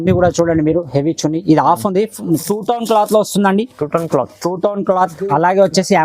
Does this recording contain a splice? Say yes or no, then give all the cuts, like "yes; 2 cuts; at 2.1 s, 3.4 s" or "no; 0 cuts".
yes; 1 cut; at 2.4 s